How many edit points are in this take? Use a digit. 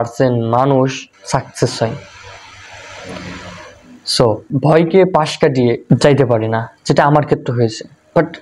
3